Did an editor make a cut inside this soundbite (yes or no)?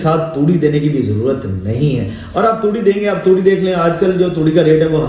no